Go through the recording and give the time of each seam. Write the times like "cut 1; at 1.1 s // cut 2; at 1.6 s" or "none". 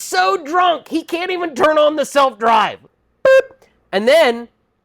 cut 1; at 2.8 s